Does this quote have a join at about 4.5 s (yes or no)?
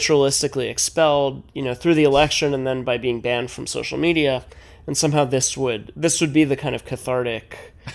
no